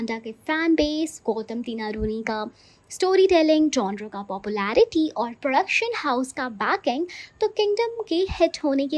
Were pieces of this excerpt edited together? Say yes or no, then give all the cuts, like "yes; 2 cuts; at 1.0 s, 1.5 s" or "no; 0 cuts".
no; 0 cuts